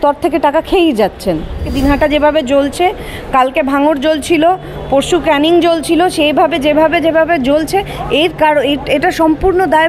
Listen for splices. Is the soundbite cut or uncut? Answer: cut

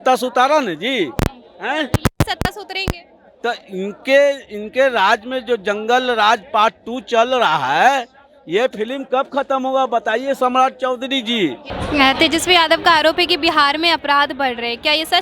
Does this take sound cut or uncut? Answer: uncut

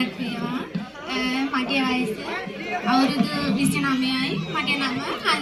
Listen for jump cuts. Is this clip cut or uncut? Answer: uncut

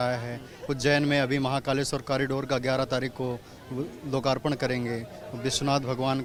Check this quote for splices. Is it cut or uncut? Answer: uncut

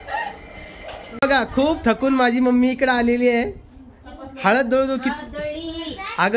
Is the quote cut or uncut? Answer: cut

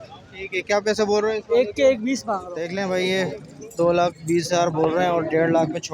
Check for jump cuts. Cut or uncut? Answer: cut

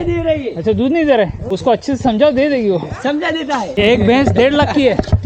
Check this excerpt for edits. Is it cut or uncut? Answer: cut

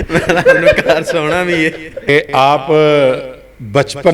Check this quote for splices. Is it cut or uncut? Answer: cut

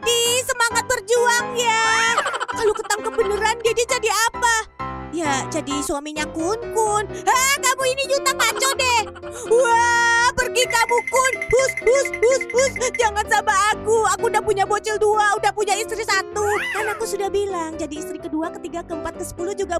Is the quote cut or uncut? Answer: cut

